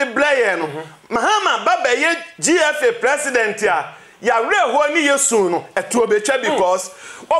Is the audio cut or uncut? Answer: uncut